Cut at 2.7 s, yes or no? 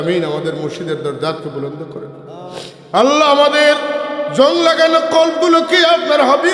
yes